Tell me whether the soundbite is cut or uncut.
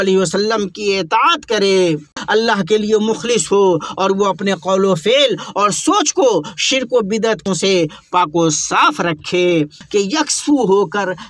cut